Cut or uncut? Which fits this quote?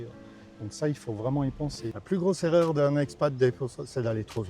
cut